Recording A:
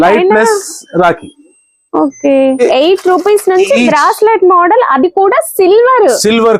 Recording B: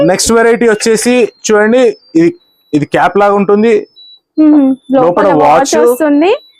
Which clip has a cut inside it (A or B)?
A